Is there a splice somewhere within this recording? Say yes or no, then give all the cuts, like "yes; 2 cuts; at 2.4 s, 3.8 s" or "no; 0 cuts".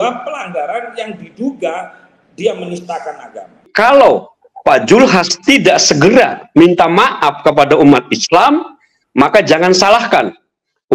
yes; 1 cut; at 3.7 s